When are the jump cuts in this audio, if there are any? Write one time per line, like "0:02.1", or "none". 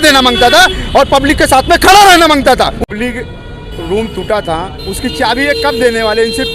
0:02.9